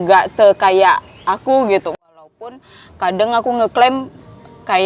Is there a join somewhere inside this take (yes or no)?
yes